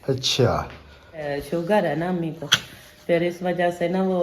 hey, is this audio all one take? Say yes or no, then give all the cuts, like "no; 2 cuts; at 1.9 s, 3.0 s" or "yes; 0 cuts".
no; 1 cut; at 1.3 s